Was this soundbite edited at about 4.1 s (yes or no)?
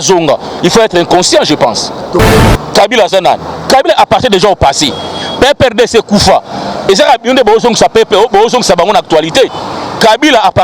no